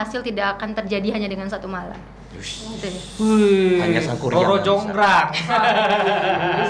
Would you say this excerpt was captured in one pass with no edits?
yes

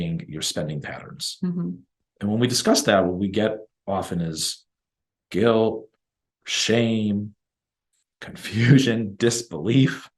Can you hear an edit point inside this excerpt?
yes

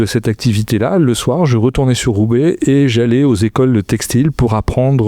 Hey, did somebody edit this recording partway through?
no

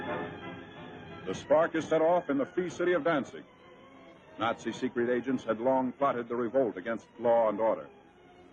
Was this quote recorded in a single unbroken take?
yes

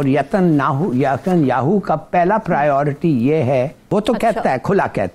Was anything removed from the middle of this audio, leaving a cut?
yes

